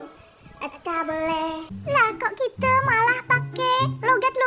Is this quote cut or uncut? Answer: cut